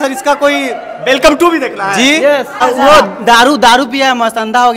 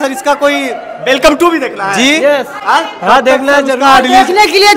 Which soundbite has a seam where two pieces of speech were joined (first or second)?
first